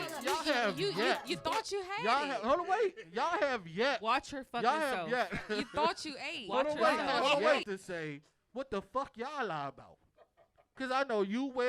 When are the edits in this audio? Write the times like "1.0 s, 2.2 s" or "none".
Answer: 7.6 s